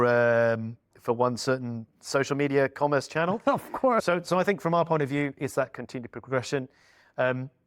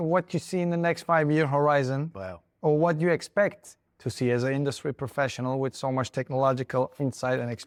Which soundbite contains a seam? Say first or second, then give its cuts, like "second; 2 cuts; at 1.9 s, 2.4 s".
first; 1 cut; at 4.0 s